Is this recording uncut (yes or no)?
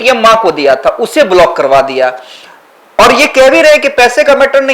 yes